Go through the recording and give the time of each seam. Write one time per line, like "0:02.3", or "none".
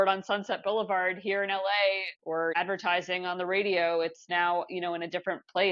0:02.3